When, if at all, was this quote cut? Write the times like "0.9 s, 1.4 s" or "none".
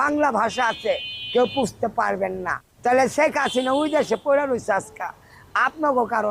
none